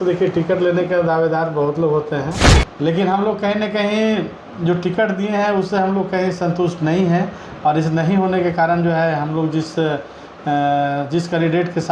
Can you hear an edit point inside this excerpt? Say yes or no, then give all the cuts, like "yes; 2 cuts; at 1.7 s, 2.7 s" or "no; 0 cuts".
yes; 1 cut; at 2.4 s